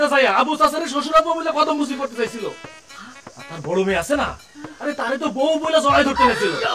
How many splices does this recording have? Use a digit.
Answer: 0